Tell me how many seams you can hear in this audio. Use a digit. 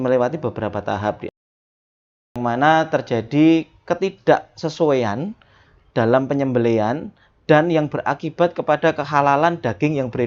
1